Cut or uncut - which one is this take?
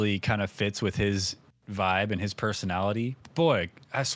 cut